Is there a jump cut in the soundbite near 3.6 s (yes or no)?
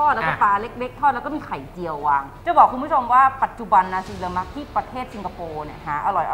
no